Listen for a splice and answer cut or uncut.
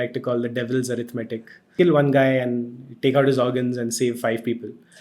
cut